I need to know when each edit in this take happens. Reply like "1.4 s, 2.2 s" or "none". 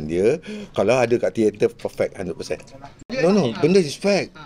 3.1 s